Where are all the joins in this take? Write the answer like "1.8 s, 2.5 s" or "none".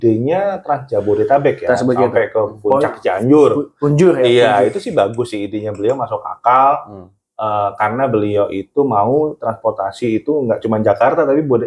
none